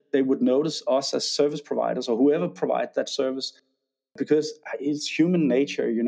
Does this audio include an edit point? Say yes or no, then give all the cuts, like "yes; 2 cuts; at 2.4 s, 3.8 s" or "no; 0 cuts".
no; 0 cuts